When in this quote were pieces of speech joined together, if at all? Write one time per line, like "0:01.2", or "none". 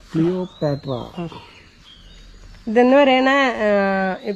none